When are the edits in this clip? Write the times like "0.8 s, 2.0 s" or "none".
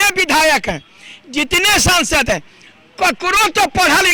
none